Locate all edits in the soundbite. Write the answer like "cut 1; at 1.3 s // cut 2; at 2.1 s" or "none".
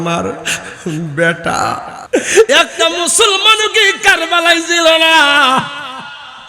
cut 1; at 1.9 s